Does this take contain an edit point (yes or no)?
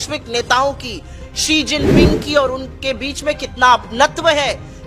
no